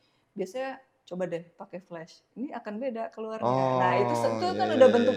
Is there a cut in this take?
no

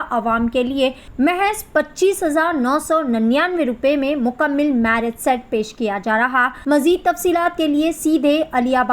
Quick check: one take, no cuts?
no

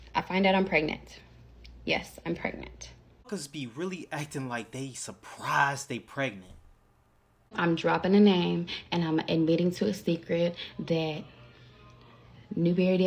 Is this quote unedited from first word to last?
no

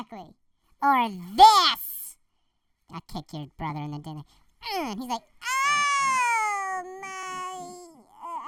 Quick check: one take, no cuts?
yes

